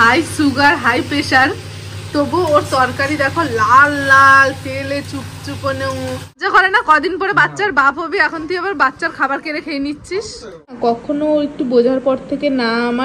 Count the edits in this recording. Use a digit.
2